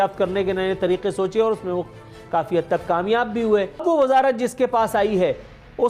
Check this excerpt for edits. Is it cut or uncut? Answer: cut